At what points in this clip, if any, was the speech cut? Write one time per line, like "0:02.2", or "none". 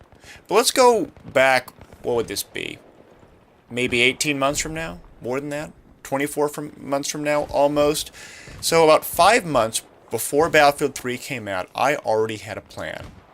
0:11.3